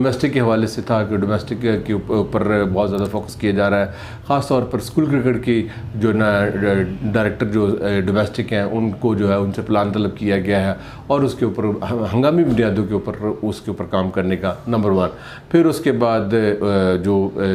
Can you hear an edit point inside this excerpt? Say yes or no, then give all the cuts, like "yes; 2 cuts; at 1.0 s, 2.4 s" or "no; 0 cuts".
no; 0 cuts